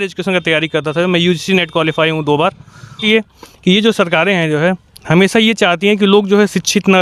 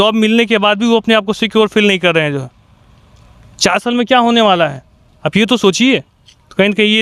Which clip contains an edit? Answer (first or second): first